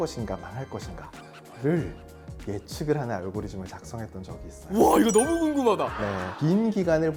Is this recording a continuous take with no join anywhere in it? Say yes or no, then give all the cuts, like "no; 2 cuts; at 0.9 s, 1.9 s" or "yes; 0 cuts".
yes; 0 cuts